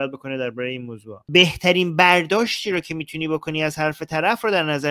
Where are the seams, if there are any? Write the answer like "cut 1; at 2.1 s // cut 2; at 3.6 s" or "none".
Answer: cut 1; at 1.3 s